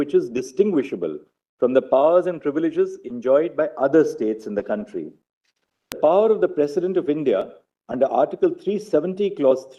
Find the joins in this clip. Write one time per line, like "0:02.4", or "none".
0:06.0